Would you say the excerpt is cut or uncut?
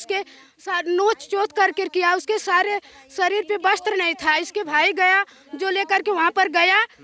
uncut